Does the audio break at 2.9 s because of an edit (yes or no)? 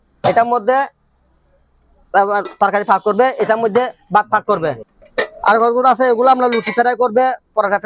no